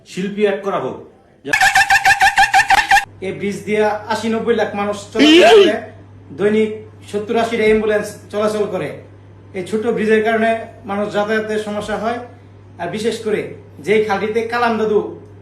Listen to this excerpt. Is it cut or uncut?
cut